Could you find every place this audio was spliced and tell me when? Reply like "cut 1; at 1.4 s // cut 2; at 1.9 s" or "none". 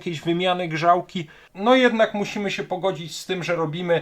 cut 1; at 1.4 s